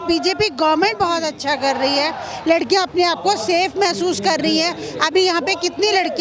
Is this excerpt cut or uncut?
uncut